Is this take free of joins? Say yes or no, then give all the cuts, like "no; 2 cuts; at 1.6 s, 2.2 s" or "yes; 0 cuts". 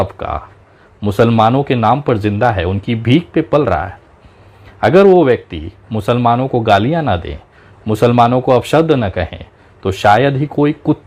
yes; 0 cuts